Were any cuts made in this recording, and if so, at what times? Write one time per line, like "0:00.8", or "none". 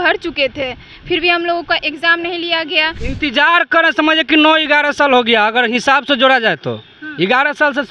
0:03.0